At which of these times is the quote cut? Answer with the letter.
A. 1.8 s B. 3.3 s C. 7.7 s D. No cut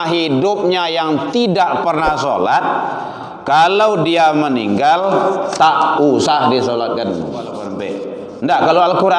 C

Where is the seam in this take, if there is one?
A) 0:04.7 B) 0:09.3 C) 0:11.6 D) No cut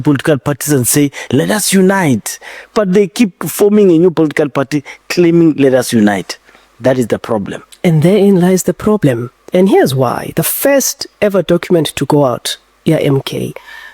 B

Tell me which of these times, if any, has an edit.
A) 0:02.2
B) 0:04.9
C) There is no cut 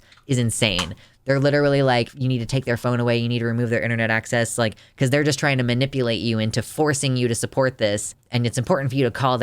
A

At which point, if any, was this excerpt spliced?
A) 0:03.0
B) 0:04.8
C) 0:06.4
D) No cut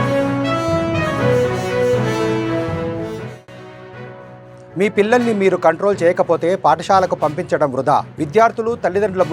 A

